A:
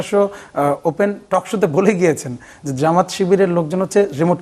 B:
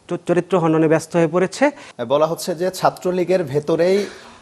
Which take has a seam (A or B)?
B